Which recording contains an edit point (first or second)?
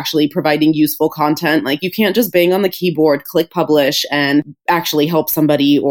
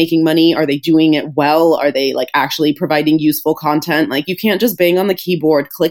first